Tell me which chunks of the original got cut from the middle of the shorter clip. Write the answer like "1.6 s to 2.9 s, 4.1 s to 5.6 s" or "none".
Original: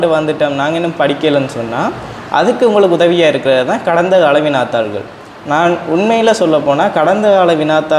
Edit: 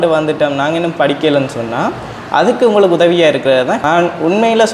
3.8 s to 5.5 s

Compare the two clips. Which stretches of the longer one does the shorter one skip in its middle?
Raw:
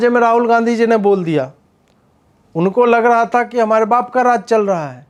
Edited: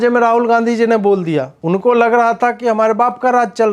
1.5 s to 2.5 s

